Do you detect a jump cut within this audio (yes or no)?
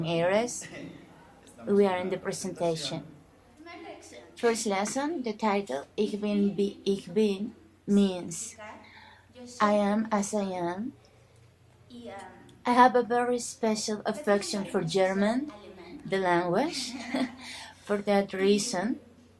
yes